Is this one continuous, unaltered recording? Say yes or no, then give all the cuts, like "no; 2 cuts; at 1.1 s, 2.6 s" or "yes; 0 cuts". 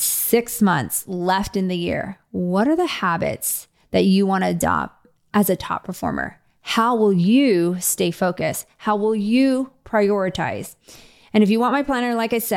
yes; 0 cuts